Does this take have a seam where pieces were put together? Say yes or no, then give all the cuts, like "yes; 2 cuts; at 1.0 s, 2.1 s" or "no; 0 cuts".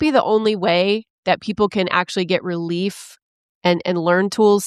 no; 0 cuts